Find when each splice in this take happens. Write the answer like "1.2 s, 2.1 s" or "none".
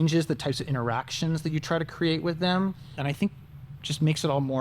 3.0 s